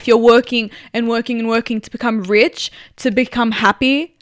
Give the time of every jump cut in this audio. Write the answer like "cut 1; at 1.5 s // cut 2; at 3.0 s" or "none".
none